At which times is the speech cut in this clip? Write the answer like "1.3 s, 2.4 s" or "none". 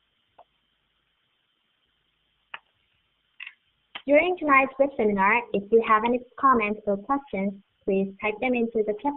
3.7 s